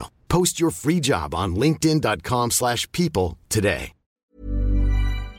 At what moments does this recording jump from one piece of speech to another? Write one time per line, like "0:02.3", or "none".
0:04.1